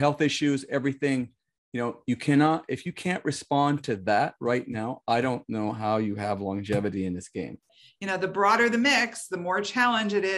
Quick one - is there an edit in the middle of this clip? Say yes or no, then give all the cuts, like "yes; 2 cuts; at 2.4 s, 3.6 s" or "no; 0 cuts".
yes; 1 cut; at 7.7 s